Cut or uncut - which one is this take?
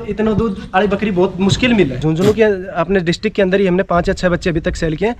cut